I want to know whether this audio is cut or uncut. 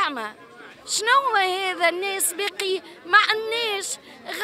uncut